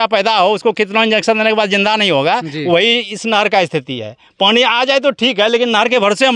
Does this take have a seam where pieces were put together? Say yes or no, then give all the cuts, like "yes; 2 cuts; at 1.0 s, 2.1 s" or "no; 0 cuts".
no; 0 cuts